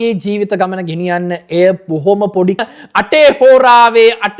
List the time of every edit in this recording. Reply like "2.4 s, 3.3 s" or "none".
2.6 s